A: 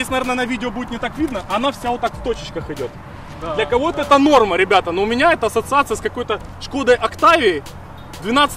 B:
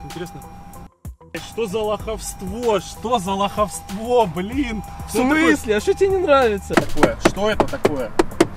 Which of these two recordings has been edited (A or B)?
B